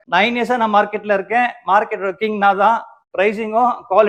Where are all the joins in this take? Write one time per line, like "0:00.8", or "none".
none